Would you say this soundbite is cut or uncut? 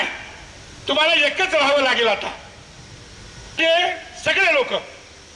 cut